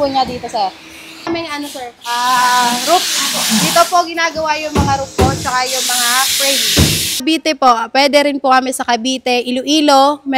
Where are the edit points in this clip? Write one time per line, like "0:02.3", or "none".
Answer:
0:01.3
0:07.2